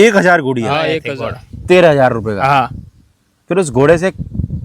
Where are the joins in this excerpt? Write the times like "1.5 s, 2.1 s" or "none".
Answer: 1.1 s